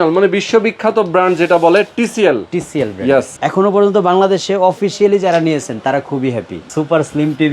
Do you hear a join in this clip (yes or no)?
yes